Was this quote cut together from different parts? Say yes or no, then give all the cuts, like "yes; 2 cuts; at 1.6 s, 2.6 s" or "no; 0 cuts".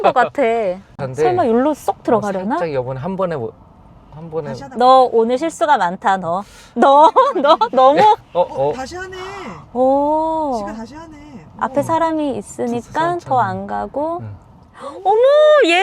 yes; 1 cut; at 1.0 s